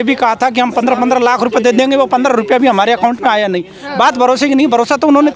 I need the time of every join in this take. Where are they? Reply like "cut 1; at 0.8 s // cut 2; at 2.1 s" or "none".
none